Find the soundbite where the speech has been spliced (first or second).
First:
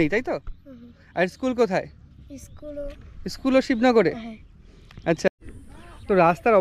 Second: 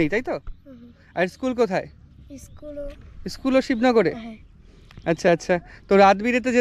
first